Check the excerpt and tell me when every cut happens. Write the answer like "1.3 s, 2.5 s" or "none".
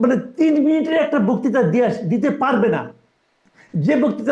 none